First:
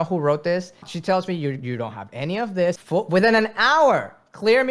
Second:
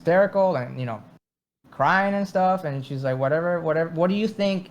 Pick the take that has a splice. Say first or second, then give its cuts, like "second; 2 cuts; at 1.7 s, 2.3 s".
first; 2 cuts; at 0.9 s, 2.8 s